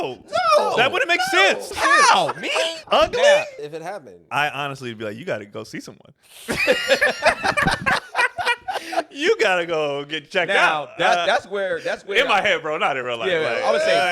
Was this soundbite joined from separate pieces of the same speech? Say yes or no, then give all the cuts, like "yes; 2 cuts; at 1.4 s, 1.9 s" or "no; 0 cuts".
yes; 3 cuts; at 1.7 s, 2.8 s, 3.6 s